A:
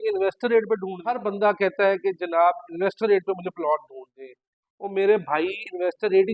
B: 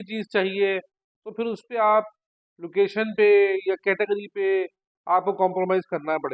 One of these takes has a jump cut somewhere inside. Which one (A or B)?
A